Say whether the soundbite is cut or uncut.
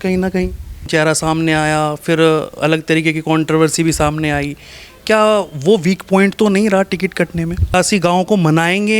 cut